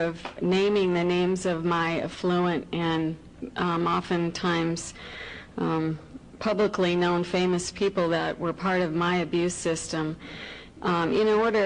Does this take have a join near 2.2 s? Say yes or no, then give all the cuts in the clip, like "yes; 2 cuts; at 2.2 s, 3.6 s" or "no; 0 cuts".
no; 1 cut; at 3.7 s